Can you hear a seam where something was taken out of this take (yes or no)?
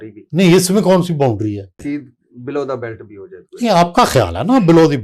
yes